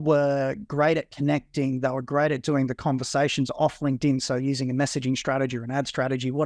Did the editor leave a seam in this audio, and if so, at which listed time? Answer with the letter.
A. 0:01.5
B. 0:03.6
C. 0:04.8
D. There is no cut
D